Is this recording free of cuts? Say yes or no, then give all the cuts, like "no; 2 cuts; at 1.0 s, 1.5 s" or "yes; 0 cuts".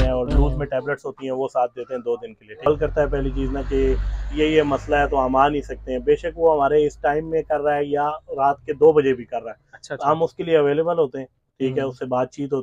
no; 1 cut; at 2.7 s